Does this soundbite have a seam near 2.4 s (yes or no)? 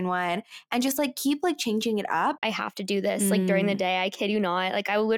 yes